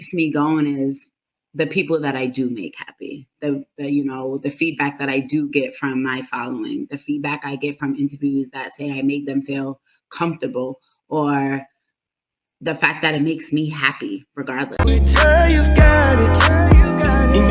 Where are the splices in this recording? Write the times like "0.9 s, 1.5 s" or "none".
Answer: 14.8 s